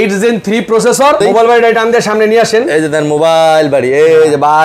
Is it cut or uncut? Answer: cut